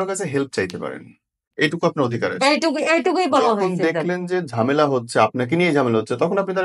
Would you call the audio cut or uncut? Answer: cut